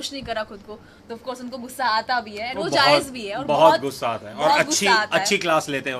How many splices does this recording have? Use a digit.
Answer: 0